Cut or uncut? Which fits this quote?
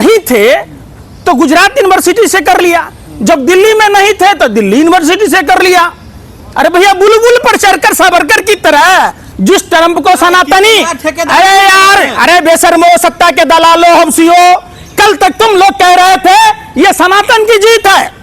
cut